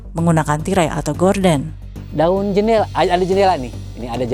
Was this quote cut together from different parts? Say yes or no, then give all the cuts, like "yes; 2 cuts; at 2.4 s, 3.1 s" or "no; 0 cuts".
yes; 1 cut; at 1.8 s